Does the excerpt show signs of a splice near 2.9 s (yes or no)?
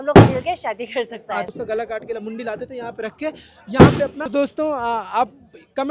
no